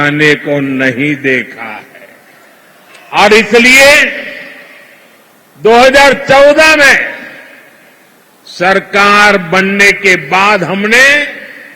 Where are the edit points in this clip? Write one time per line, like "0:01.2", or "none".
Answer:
0:02.7